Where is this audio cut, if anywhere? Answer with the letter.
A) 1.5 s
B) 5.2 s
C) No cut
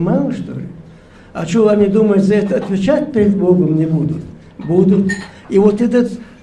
C